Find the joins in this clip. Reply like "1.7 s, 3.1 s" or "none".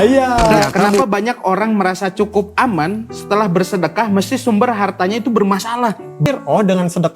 0.9 s, 6.2 s